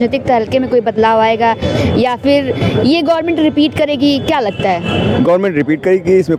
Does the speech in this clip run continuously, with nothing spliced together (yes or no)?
yes